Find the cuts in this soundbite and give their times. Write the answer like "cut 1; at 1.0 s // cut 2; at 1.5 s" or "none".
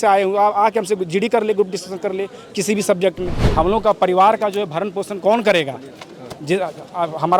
cut 1; at 3.4 s